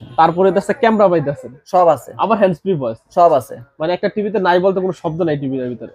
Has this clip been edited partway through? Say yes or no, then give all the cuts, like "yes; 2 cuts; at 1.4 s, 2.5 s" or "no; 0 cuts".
no; 0 cuts